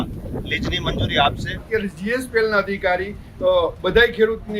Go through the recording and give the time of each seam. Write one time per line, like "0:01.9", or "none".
0:01.6